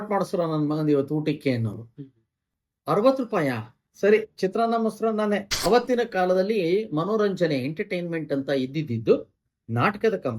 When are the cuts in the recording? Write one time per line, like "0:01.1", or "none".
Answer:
0:05.5